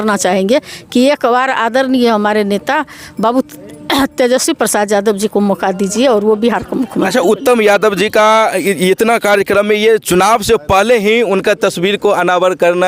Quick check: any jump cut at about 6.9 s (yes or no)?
no